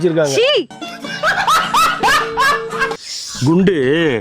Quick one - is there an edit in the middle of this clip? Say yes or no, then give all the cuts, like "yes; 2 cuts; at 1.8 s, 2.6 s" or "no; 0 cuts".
yes; 1 cut; at 3.2 s